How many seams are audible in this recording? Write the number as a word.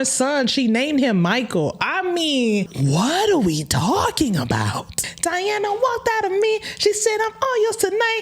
two